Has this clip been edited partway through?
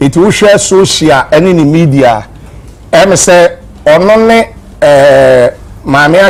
no; 0 cuts

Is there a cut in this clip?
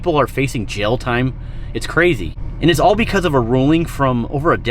no; 0 cuts

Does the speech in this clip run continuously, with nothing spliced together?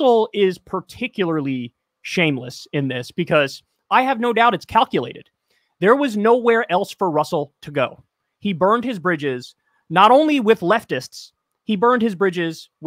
yes; 0 cuts

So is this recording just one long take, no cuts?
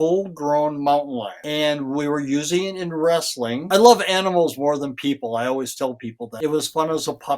no; 2 cuts; at 3.6 s, 6.2 s

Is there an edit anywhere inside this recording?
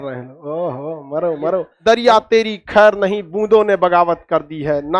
yes; 1 cut; at 1.7 s

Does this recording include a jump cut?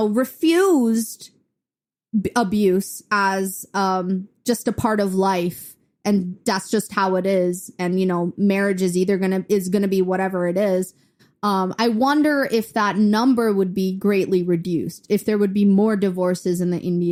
no; 0 cuts

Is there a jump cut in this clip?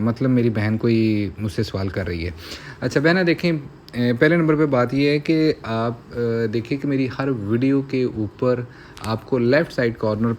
no; 0 cuts

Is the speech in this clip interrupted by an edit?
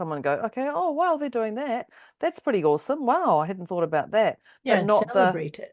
no; 0 cuts

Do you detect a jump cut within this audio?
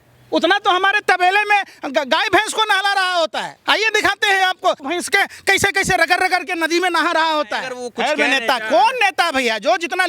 yes; 3 cuts; at 3.5 s, 4.8 s, 7.8 s

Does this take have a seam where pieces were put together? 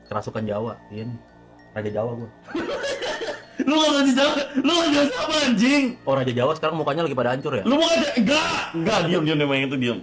no; 0 cuts

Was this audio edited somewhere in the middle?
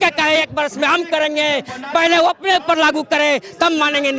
no; 0 cuts

